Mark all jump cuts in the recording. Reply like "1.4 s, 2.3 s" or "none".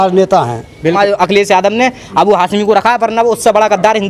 1.0 s